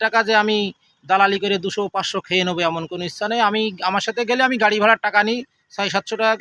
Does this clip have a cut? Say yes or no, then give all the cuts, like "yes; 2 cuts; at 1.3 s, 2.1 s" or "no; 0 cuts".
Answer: no; 0 cuts